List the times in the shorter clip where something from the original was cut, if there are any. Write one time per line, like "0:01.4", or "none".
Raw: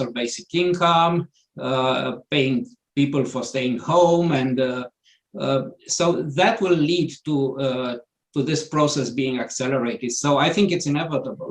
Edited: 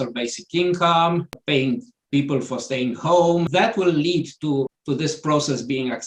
0:01.4
0:03.5
0:04.7